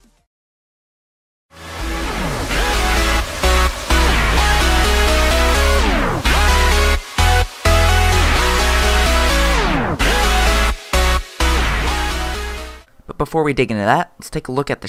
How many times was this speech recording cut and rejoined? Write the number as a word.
zero